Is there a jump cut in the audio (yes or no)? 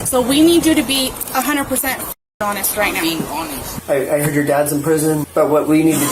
yes